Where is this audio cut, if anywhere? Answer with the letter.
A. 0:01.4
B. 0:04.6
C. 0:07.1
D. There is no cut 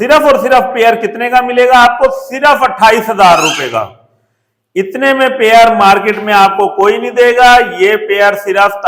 D